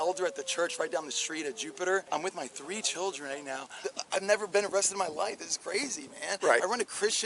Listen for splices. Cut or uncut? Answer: cut